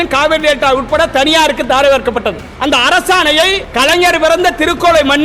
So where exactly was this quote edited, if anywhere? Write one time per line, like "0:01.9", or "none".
0:02.5
0:03.6